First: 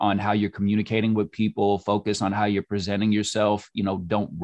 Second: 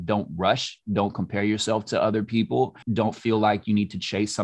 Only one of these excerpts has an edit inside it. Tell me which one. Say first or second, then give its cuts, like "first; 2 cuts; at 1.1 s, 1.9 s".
second; 1 cut; at 2.8 s